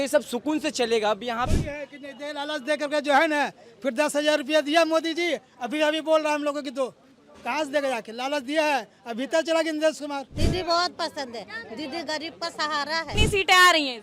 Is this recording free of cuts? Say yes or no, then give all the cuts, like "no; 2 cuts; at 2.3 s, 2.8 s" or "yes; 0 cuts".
no; 3 cuts; at 1.5 s, 10.3 s, 13.1 s